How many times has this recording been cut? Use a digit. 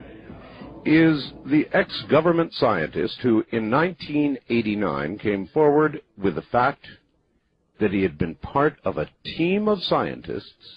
0